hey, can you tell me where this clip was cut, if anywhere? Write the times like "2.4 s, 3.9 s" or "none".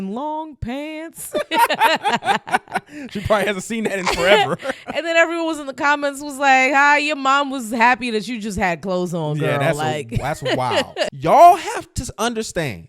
11.1 s